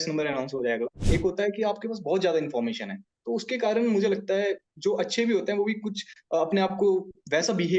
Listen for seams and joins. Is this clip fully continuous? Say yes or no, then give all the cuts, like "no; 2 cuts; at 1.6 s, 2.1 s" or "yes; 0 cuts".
no; 1 cut; at 1.0 s